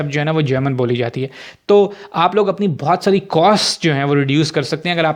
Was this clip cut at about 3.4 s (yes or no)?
no